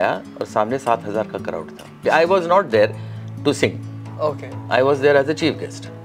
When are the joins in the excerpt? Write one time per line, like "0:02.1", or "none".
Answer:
0:02.0

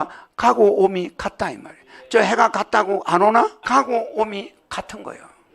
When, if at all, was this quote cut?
0:03.6

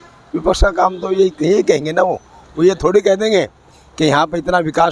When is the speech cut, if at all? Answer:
none

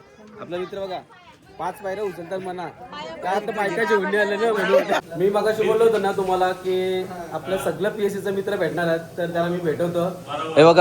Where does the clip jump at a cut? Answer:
0:05.0

